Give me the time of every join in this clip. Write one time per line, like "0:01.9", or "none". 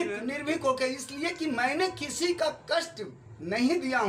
none